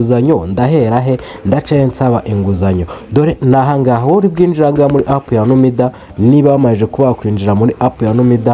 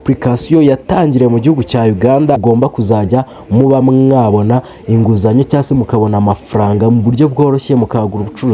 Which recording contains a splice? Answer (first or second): second